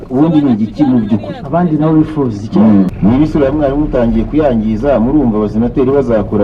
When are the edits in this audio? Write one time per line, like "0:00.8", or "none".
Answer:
0:02.9